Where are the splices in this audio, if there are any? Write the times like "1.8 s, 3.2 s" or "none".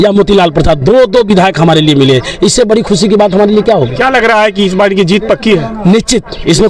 none